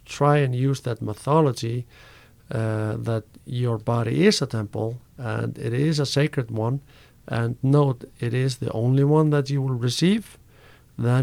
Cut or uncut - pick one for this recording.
uncut